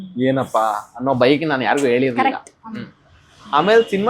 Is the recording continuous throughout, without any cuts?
yes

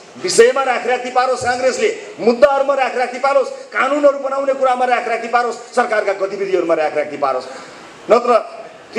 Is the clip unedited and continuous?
yes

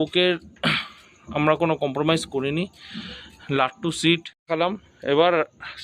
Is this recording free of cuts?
no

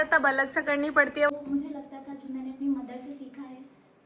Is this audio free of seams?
no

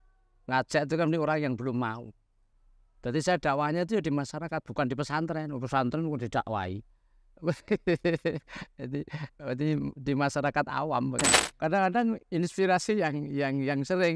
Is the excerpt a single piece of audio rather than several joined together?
no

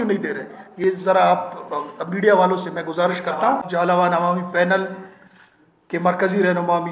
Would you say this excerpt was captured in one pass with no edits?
no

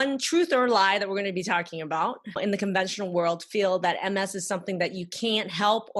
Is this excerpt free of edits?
no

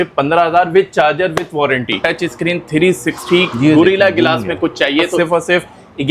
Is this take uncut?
no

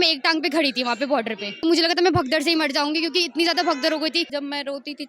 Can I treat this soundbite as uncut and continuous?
no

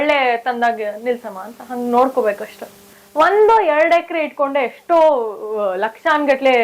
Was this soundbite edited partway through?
yes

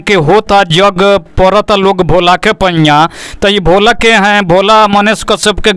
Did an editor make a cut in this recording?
no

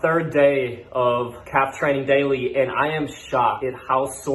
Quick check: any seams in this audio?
yes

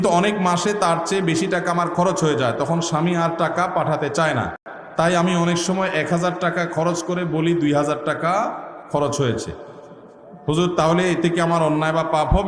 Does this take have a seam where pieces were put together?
no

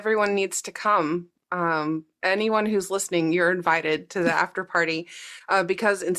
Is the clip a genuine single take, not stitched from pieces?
yes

